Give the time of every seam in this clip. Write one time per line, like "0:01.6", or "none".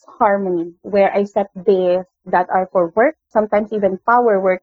0:02.1
0:03.2